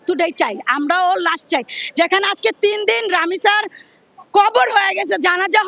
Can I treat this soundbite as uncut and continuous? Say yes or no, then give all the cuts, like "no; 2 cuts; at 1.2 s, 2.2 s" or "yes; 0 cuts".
yes; 0 cuts